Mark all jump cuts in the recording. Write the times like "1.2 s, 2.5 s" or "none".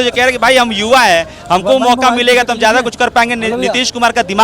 none